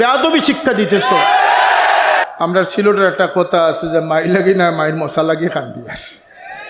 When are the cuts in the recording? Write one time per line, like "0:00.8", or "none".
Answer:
0:02.3